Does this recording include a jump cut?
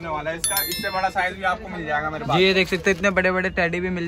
no; 0 cuts

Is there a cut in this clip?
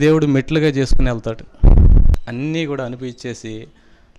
yes; 1 cut; at 2.2 s

